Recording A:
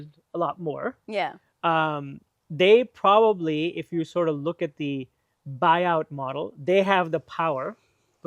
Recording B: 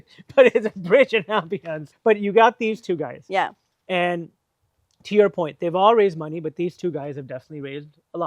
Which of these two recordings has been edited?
B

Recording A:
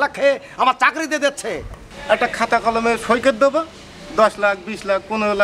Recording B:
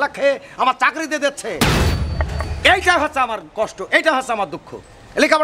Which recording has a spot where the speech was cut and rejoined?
A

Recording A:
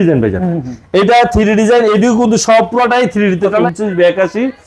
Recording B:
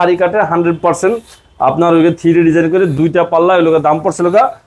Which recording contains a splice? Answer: A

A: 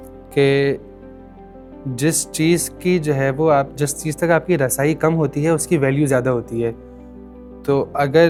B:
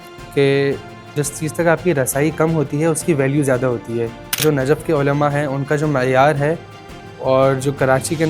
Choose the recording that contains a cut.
B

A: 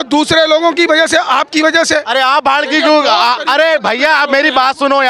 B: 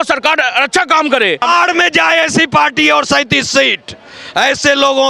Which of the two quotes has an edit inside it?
B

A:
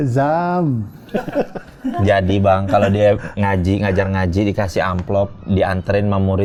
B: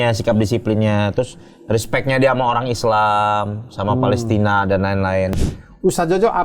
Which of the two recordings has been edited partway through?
B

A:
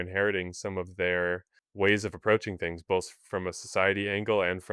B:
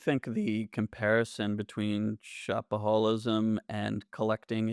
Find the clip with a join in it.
A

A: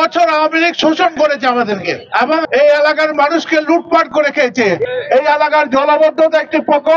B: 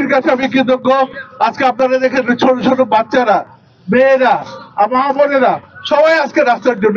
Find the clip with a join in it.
A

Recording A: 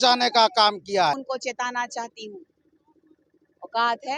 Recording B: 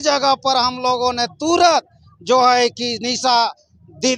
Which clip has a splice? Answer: A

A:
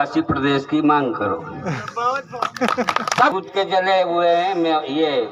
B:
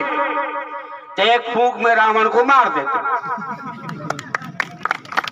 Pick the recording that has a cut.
A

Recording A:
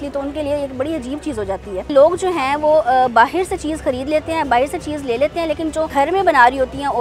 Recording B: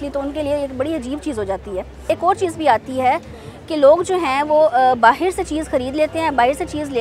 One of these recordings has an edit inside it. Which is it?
A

